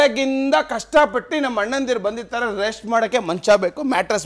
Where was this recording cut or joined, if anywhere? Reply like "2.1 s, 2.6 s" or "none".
none